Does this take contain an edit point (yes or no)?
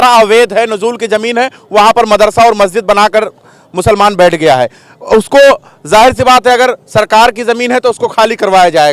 no